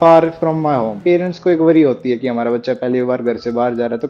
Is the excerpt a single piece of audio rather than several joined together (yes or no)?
no